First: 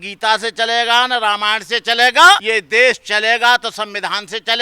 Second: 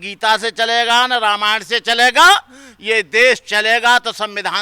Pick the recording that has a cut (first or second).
first